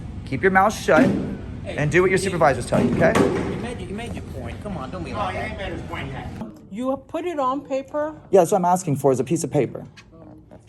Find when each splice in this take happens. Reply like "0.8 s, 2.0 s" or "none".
6.4 s